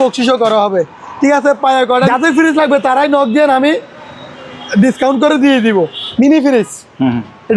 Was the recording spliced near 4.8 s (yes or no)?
no